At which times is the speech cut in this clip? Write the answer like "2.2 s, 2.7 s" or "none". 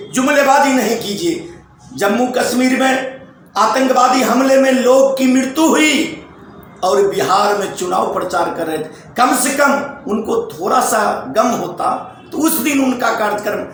none